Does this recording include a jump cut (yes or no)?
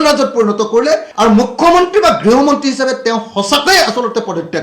yes